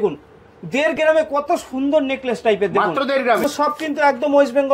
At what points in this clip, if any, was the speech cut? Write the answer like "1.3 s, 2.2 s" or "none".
3.4 s